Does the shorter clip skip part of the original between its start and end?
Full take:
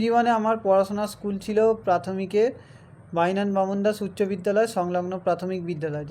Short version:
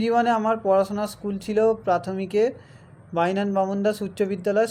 no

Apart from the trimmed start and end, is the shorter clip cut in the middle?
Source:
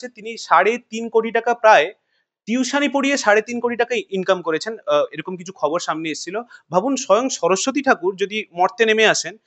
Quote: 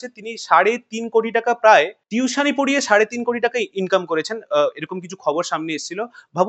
yes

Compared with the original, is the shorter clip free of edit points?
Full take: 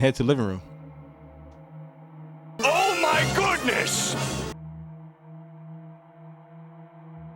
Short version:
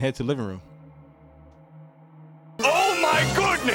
yes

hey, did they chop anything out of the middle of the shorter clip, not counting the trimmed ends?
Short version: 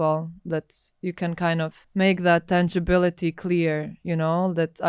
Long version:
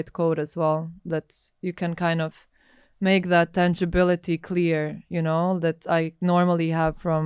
yes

